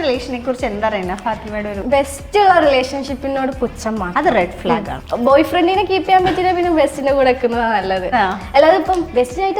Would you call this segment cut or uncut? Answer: cut